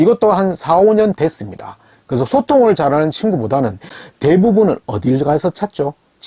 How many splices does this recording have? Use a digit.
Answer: 1